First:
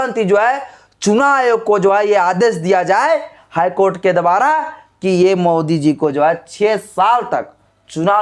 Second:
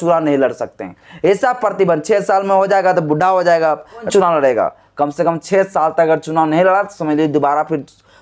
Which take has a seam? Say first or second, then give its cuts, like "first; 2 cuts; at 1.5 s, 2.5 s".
second; 1 cut; at 4.1 s